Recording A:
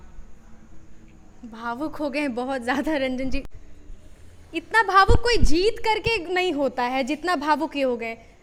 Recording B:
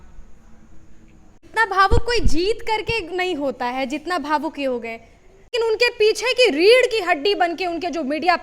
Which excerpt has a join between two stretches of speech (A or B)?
B